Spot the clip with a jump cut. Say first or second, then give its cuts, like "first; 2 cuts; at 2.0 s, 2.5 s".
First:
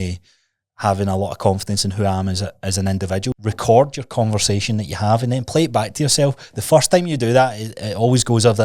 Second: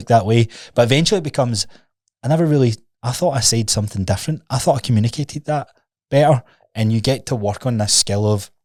first; 1 cut; at 3.3 s